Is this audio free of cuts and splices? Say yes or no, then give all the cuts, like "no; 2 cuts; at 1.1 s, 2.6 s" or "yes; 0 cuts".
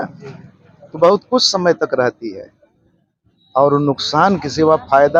yes; 0 cuts